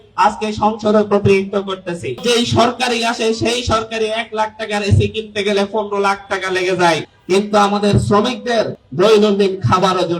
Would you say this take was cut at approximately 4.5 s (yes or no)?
no